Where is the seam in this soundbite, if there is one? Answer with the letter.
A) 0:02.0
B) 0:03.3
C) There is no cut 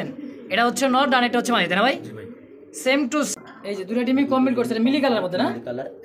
B